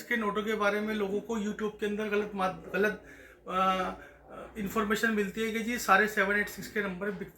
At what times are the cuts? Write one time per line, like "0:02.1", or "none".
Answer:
none